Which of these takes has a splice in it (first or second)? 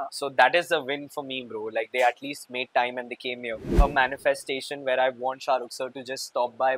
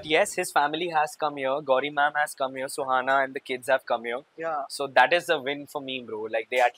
first